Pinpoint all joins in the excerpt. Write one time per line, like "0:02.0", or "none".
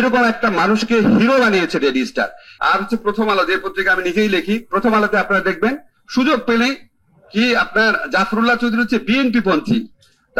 0:02.4